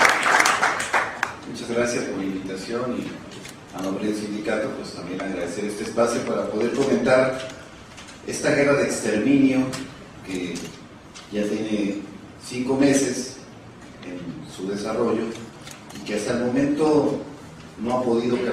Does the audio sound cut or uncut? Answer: cut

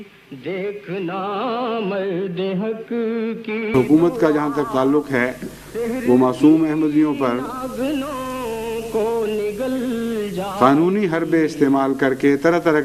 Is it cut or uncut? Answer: uncut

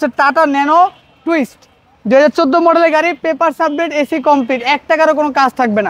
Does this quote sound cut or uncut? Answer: uncut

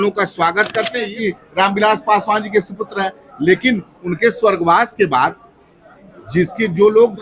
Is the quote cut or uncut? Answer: cut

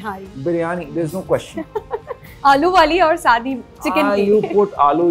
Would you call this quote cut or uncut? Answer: uncut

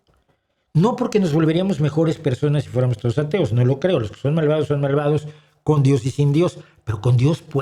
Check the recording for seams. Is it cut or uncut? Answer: uncut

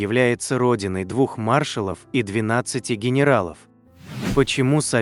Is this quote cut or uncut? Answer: cut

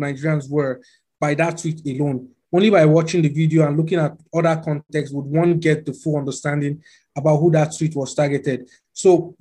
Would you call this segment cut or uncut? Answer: uncut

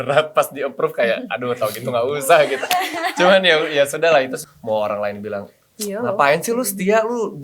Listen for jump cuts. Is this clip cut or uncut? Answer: cut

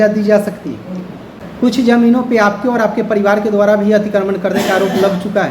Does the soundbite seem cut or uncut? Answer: cut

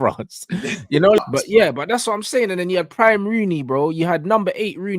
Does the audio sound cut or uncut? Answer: cut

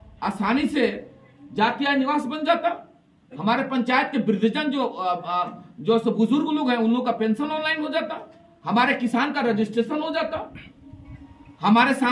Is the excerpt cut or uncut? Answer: uncut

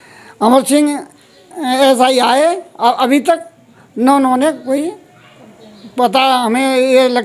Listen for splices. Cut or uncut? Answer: uncut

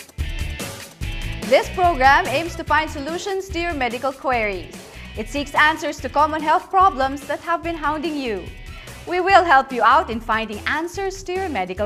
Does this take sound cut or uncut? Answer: uncut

